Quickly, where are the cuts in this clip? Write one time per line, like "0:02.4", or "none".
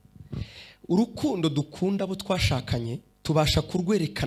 0:03.1